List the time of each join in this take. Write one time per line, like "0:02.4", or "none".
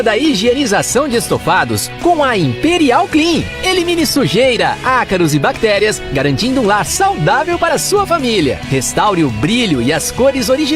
none

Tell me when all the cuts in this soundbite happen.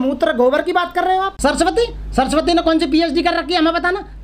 0:01.3

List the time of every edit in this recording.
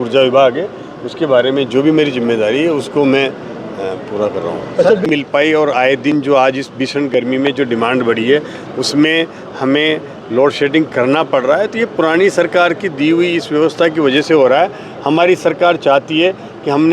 0:05.1

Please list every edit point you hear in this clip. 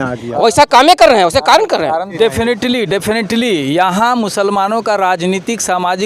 0:02.1

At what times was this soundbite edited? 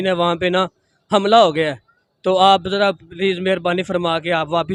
none

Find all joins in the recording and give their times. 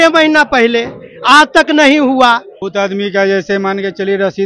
0:02.6

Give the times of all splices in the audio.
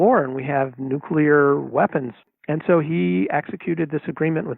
0:02.2

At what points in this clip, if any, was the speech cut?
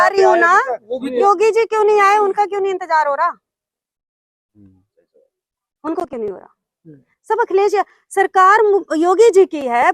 0:01.2

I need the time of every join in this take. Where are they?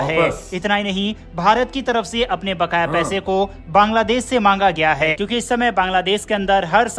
0:05.1

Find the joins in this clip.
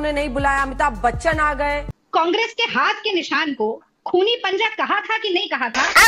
0:01.9

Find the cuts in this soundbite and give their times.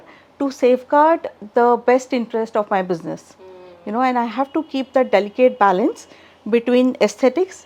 none

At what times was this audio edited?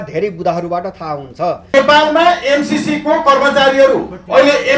0:01.7

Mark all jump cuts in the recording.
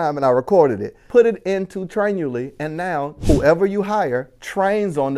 0:00.9
0:03.1

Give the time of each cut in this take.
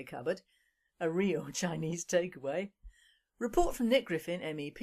0:01.8

